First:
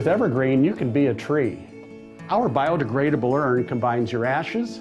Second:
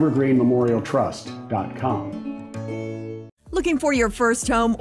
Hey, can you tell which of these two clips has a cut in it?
second; 1 cut; at 3.4 s

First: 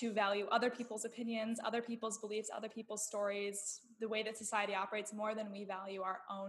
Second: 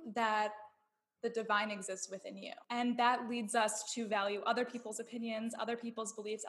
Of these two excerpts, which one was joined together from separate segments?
second; 1 cut; at 2.7 s

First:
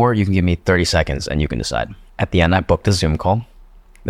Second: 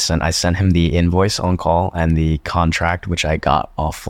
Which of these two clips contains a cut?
first; 1 cut; at 2.1 s

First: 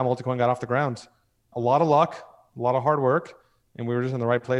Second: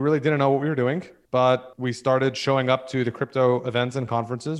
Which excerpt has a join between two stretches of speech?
second; 2 cuts; at 1.1 s, 1.7 s

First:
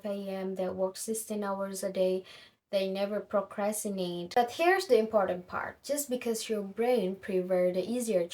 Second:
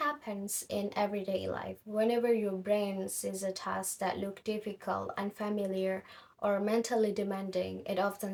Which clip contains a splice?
first; 1 cut; at 4.3 s

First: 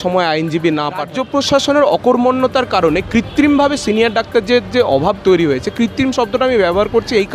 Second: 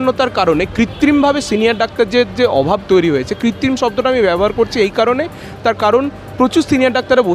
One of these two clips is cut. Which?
first; 1 cut; at 1.1 s

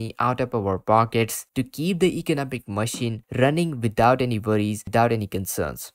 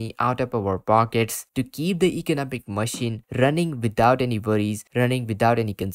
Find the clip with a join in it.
first; 1 cut; at 4.8 s

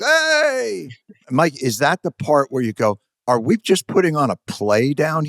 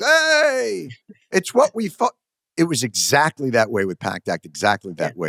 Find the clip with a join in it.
first; 2 cuts; at 1.2 s, 3.1 s

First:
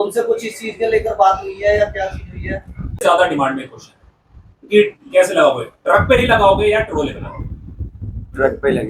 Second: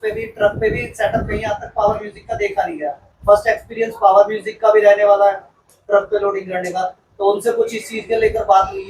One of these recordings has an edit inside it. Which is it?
first; 1 cut; at 3.0 s

